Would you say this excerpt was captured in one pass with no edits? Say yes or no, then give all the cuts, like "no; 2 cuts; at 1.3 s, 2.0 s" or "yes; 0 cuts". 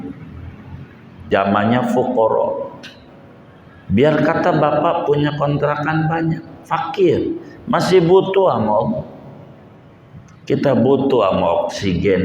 no; 1 cut; at 1.3 s